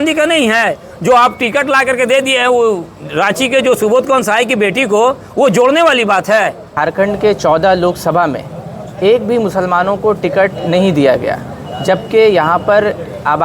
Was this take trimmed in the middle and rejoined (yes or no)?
yes